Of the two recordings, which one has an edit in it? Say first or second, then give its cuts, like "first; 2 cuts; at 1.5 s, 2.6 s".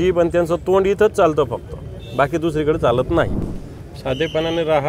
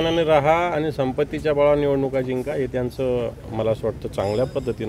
first; 1 cut; at 3.4 s